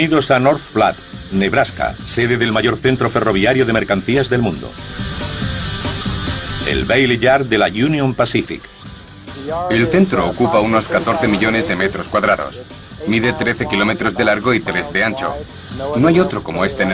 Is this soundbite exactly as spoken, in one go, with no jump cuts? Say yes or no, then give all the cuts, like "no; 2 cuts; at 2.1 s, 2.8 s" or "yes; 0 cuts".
no; 1 cut; at 5.5 s